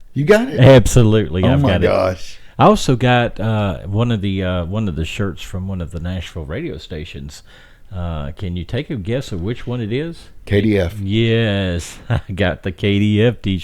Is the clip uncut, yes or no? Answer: no